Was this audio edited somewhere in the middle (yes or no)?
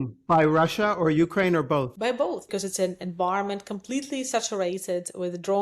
yes